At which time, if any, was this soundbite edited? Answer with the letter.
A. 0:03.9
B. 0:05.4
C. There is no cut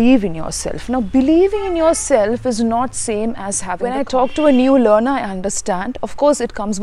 A